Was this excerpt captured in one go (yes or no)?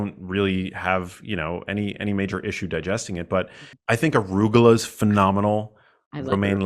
no